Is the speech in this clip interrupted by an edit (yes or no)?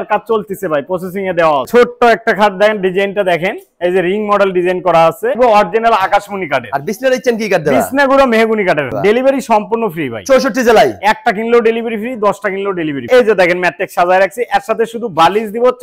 yes